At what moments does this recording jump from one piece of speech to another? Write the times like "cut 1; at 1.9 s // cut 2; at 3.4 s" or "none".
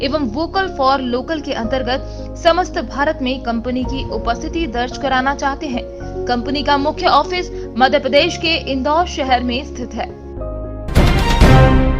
cut 1; at 10.9 s